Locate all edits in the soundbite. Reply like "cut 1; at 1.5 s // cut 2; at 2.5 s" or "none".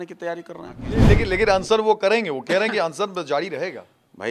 cut 1; at 1.0 s